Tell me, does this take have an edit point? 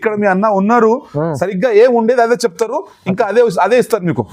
no; 0 cuts

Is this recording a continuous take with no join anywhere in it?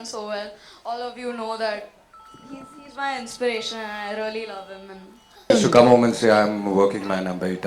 no; 1 cut; at 5.5 s

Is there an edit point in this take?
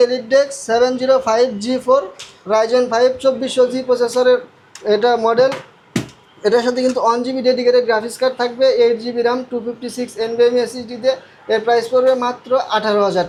no; 0 cuts

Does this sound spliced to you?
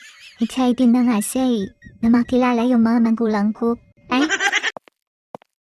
yes; 1 cut; at 4.7 s

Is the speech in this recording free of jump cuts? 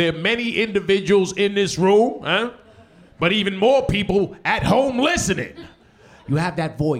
yes; 0 cuts

